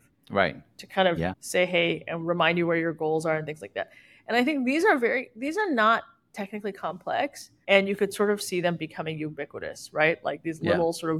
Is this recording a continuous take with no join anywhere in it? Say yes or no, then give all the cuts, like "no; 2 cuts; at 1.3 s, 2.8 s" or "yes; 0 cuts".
yes; 0 cuts